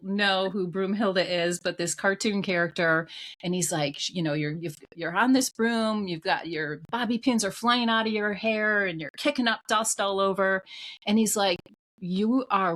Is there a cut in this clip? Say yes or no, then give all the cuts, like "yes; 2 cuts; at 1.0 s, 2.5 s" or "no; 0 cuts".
no; 0 cuts